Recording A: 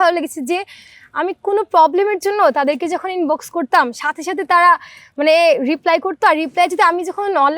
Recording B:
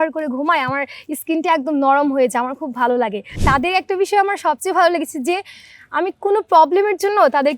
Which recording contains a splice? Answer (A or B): B